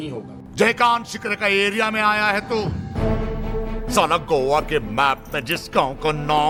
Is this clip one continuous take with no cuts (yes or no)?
yes